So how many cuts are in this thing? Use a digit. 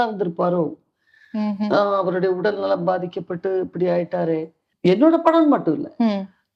1